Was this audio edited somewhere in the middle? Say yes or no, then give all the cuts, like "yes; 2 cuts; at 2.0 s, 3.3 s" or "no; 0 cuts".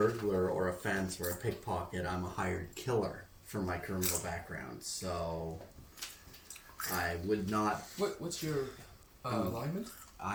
no; 0 cuts